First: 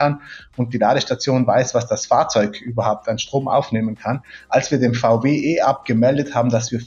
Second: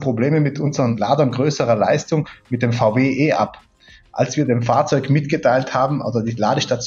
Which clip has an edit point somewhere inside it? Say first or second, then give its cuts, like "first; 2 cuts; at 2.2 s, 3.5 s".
second; 1 cut; at 0.9 s